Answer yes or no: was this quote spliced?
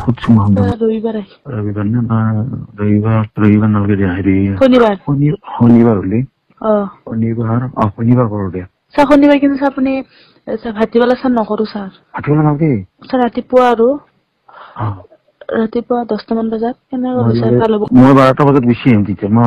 yes